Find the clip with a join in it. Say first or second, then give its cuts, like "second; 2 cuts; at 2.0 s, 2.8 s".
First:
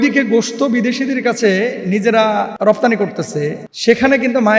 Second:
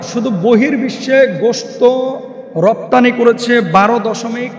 first; 2 cuts; at 2.5 s, 3.7 s